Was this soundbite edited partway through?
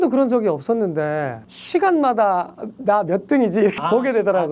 no; 0 cuts

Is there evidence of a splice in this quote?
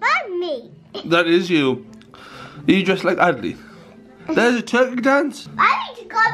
no; 0 cuts

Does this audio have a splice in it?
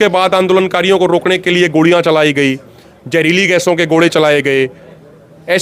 no; 0 cuts

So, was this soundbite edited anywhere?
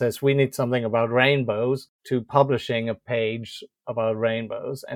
yes; 1 cut; at 1.9 s

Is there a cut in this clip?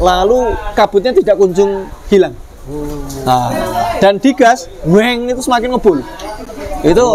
no; 0 cuts

